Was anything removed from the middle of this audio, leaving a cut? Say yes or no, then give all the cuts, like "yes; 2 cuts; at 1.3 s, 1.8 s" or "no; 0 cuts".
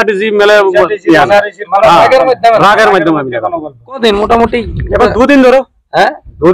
yes; 1 cut; at 4.0 s